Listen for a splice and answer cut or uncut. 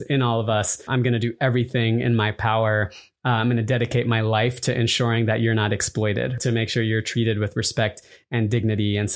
cut